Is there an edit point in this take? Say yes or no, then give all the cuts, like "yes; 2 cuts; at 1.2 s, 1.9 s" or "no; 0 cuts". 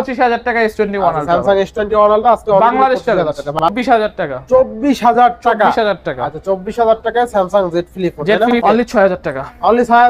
yes; 2 cuts; at 3.6 s, 8.6 s